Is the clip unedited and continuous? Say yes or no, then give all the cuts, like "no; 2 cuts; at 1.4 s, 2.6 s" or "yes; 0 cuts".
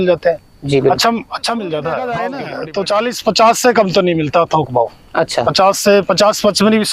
no; 1 cut; at 2.3 s